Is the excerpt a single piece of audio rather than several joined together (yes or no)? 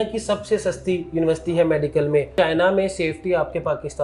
no